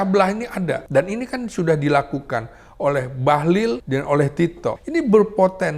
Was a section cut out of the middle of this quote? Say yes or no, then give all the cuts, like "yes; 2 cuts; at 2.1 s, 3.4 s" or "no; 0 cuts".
yes; 3 cuts; at 0.8 s, 3.8 s, 4.8 s